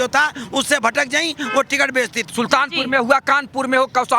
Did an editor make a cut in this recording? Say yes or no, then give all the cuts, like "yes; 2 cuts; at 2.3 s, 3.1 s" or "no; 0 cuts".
yes; 1 cut; at 2.2 s